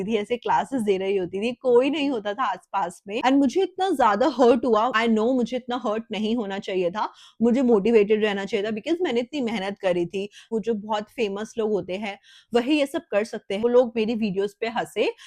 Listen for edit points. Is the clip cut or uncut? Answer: cut